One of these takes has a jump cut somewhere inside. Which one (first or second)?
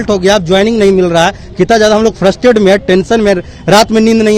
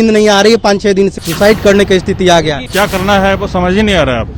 second